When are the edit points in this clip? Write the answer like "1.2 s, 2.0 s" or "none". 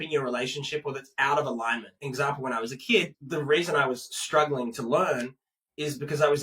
1.9 s, 3.2 s